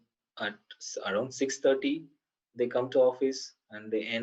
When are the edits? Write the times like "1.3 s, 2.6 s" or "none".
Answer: none